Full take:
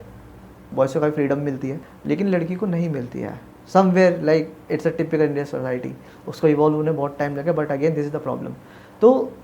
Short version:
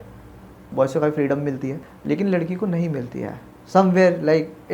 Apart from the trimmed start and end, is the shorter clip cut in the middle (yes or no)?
no